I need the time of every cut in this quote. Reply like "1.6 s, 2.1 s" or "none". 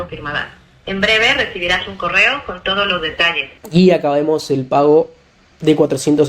3.5 s